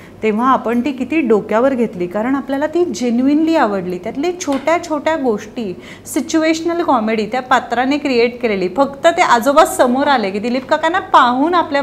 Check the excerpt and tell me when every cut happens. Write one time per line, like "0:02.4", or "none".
none